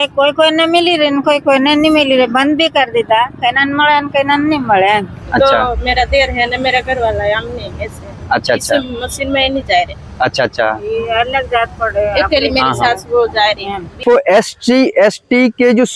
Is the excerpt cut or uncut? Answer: cut